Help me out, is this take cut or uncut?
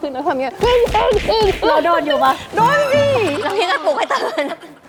uncut